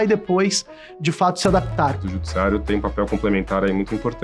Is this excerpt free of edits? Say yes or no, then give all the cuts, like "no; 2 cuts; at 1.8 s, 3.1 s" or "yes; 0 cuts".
no; 1 cut; at 2.0 s